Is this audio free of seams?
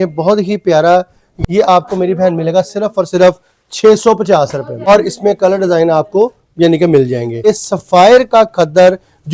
no; 3 cuts; at 1.3 s, 4.9 s, 7.5 s

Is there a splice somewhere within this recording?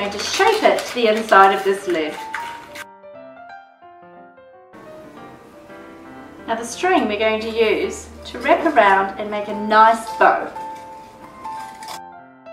yes; 1 cut; at 4.5 s

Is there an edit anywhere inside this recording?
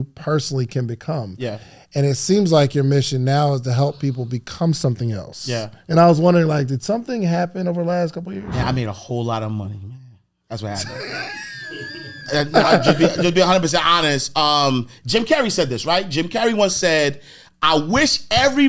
no; 0 cuts

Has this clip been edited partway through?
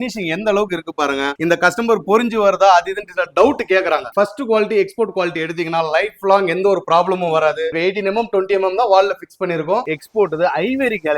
yes; 3 cuts; at 4.1 s, 7.7 s, 9.9 s

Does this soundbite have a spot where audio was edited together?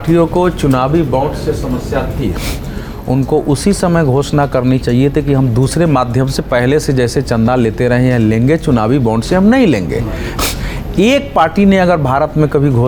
no; 0 cuts

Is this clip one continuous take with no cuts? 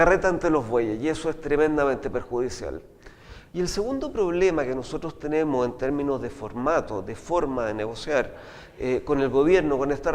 no; 1 cut; at 4.4 s

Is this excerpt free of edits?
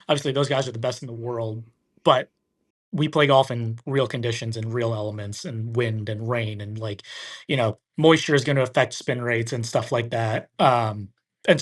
yes; 0 cuts

